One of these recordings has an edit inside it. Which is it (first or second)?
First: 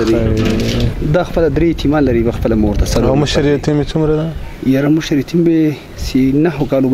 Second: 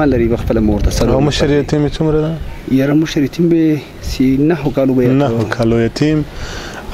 first